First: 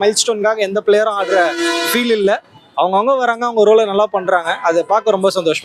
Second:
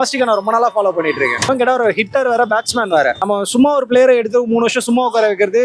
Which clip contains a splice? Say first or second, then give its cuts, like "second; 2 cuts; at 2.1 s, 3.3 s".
second; 1 cut; at 1.5 s